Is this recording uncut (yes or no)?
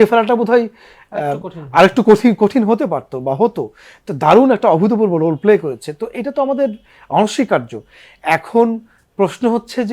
yes